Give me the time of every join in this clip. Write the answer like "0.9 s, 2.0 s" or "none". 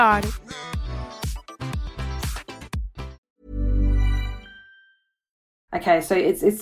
3.2 s, 5.5 s